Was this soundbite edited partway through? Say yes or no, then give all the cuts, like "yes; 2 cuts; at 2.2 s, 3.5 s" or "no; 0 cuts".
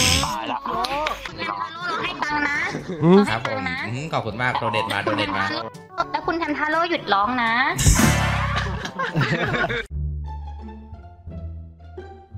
yes; 1 cut; at 9.9 s